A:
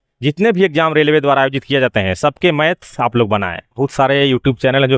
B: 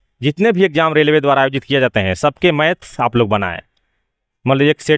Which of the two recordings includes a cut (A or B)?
A